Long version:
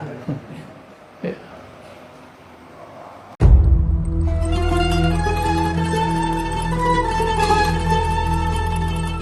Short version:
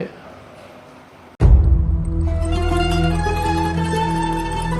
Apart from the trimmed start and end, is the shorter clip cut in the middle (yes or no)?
yes